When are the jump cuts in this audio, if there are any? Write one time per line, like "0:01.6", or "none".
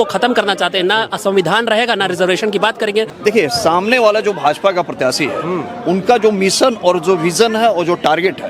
0:03.1